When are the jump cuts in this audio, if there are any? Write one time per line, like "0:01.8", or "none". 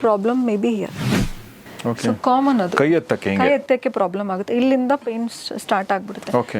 0:01.4